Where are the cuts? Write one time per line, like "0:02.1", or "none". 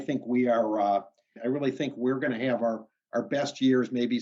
0:01.3